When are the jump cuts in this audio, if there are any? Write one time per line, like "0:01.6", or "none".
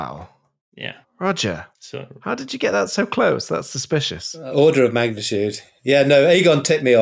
none